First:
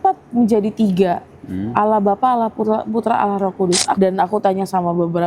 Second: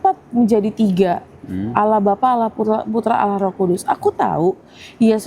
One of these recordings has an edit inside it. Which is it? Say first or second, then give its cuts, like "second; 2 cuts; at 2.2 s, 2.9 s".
first; 1 cut; at 4.0 s